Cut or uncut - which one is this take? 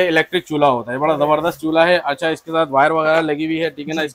uncut